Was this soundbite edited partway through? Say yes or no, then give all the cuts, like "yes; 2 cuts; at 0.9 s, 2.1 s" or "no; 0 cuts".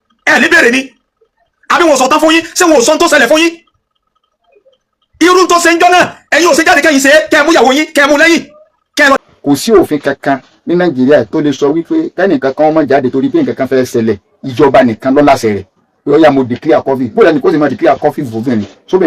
yes; 1 cut; at 9.2 s